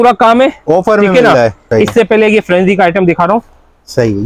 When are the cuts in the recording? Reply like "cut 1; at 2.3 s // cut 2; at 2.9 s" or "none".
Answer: cut 1; at 1.6 s